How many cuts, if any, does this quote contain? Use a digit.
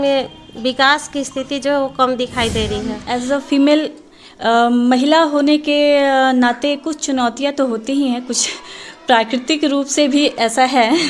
1